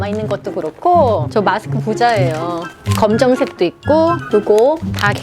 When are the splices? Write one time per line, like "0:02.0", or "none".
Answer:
0:01.3
0:02.7
0:04.2

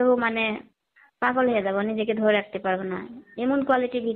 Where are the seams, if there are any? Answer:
none

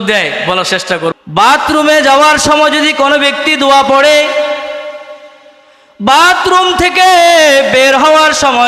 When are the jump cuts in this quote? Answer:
0:01.1

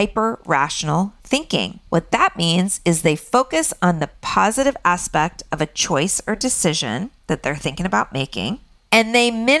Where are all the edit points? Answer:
none

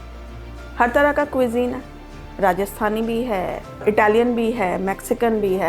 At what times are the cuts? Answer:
0:03.8

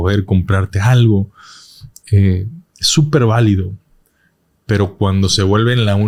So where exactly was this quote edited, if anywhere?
none

